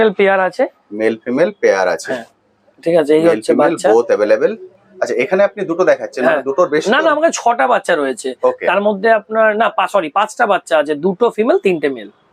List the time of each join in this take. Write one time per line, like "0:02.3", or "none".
none